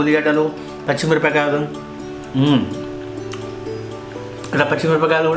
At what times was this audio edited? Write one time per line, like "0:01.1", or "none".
0:02.7
0:04.5